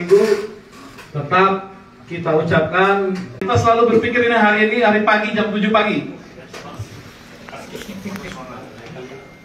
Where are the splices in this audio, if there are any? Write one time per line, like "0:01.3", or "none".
0:03.4